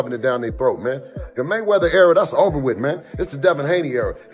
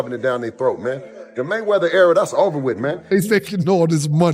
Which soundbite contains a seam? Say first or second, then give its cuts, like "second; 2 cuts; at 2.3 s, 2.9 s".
second; 1 cut; at 3.1 s